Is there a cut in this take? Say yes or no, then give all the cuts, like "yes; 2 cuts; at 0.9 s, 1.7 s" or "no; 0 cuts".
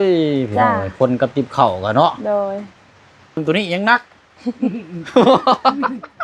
yes; 1 cut; at 3.4 s